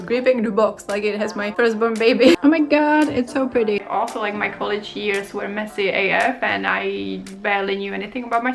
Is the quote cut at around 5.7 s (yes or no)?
no